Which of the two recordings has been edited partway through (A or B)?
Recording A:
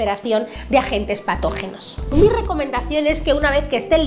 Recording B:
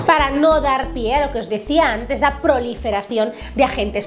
A